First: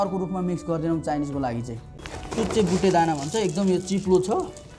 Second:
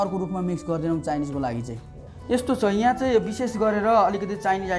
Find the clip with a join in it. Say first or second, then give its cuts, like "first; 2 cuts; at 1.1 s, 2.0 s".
first; 1 cut; at 2.1 s